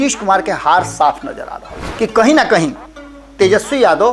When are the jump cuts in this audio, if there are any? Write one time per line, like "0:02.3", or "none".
0:01.8